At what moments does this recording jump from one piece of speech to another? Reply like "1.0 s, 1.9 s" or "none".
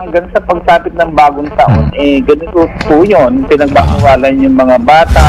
none